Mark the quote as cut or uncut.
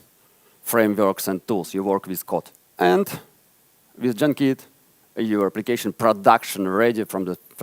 cut